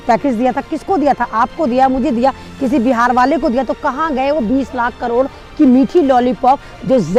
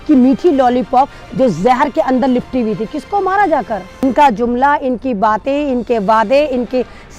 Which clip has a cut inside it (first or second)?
second